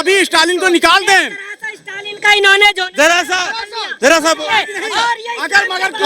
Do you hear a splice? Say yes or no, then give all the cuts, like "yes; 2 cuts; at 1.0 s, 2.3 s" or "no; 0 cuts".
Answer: no; 0 cuts